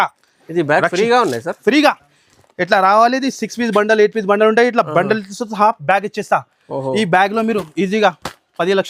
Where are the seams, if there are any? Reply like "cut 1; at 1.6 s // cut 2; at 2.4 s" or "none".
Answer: none